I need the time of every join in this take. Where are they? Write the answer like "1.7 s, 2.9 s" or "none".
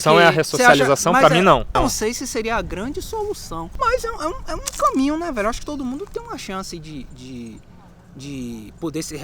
1.7 s, 3.6 s